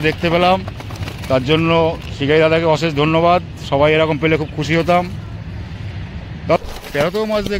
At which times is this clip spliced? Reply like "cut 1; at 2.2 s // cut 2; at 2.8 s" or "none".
cut 1; at 6.6 s